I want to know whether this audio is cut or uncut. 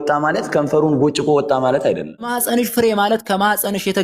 cut